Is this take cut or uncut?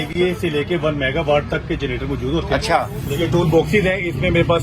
cut